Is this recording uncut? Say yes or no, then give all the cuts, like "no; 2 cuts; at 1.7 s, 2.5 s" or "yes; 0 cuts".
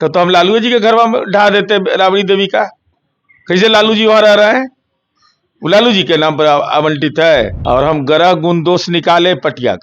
no; 1 cut; at 7.6 s